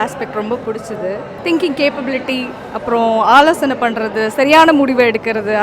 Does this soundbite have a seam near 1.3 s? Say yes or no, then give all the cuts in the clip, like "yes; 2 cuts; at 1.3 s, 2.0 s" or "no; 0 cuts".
yes; 1 cut; at 1.3 s